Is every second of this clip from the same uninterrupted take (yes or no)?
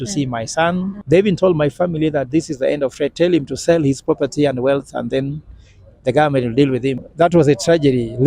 no